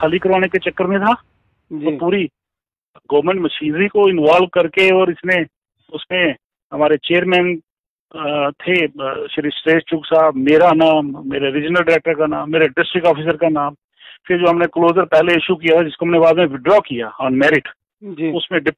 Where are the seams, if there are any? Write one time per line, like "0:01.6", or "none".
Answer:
none